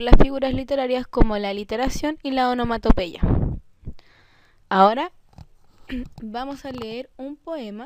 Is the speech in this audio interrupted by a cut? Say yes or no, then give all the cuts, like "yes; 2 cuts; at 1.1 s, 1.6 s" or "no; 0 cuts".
yes; 1 cut; at 5.0 s